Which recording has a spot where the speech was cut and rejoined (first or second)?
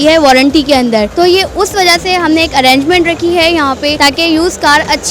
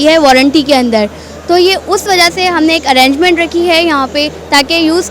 first